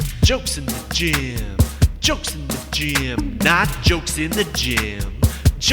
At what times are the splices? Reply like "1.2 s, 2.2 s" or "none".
none